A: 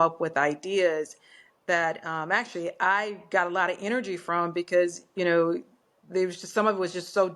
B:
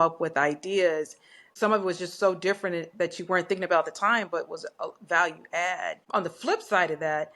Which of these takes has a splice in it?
B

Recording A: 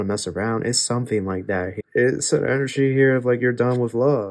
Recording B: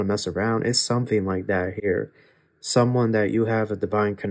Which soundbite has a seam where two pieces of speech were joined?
A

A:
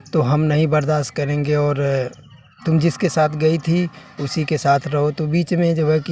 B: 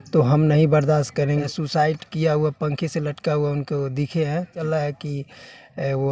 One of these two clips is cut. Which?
B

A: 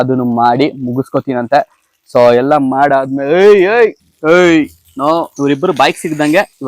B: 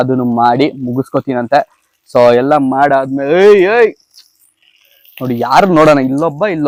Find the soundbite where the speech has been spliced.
A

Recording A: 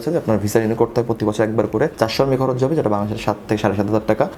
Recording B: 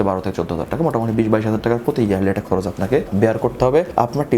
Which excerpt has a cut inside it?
B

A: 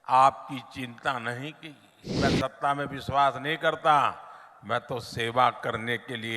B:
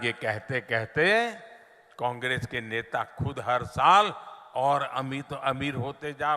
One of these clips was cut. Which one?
A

